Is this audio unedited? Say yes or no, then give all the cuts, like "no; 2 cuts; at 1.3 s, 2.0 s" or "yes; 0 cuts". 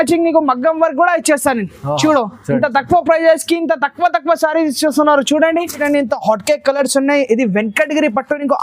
no; 1 cut; at 5.8 s